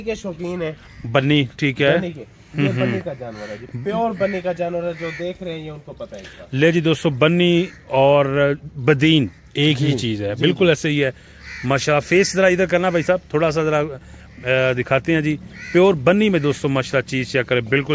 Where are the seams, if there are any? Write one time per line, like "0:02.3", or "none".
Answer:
none